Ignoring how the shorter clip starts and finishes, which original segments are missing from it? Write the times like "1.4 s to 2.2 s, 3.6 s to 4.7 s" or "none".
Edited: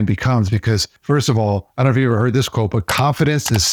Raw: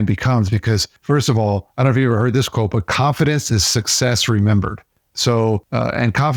none